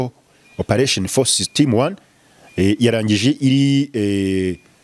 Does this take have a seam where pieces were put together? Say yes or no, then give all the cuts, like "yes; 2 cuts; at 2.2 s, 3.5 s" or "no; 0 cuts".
no; 0 cuts